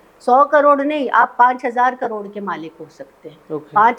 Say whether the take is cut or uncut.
uncut